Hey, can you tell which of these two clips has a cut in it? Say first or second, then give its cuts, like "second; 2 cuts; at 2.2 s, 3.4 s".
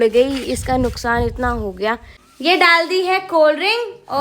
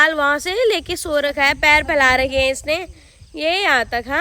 first; 1 cut; at 2.2 s